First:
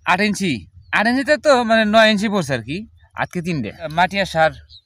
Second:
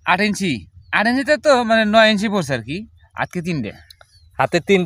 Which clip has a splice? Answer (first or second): first